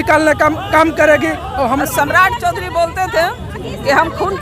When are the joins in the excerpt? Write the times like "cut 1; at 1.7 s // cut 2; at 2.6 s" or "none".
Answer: cut 1; at 1.8 s